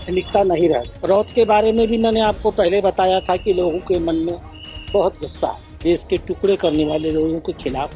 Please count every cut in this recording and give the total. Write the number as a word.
two